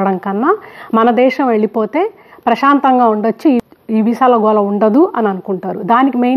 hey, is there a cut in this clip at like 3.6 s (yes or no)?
no